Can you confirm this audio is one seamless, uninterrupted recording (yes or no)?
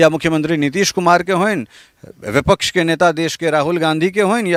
yes